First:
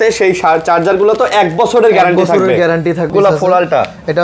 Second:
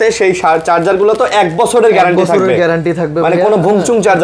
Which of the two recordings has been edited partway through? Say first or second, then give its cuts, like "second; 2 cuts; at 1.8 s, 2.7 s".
first; 1 cut; at 3.1 s